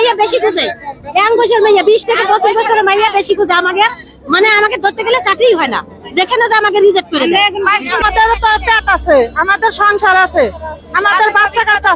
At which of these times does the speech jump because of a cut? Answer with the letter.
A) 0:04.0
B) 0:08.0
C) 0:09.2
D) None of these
B